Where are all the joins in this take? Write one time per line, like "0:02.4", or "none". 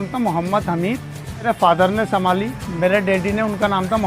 0:01.4

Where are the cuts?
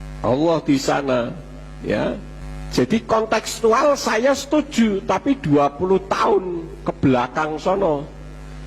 0:01.7

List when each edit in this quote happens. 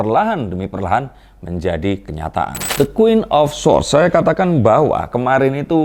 0:02.7

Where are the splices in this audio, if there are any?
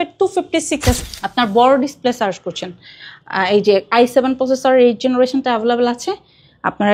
0:01.0

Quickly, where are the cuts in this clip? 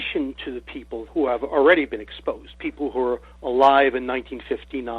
0:01.0

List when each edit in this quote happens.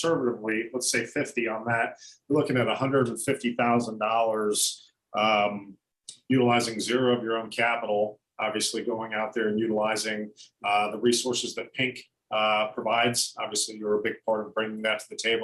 none

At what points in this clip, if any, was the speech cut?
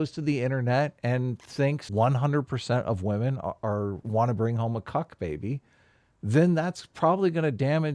0:01.8

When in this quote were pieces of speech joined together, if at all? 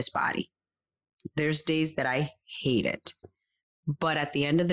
none

